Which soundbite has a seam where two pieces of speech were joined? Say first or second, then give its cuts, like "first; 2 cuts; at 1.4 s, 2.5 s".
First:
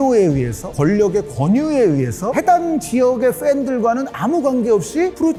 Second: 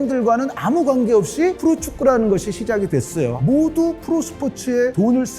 second; 1 cut; at 3.4 s